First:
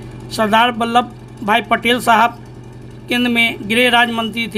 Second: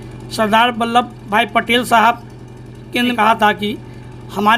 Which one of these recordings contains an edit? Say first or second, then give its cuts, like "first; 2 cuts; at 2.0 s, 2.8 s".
second; 2 cuts; at 1.2 s, 3.1 s